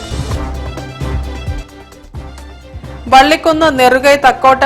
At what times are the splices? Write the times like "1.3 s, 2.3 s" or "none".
2.6 s